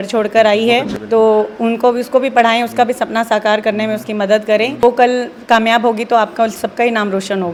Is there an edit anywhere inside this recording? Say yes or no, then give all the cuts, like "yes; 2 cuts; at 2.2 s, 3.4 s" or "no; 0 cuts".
no; 0 cuts